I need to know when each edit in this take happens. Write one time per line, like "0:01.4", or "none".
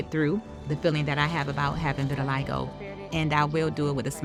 none